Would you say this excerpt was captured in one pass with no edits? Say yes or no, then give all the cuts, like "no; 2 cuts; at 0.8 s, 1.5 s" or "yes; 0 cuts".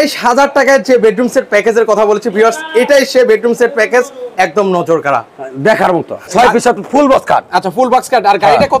no; 1 cut; at 6.3 s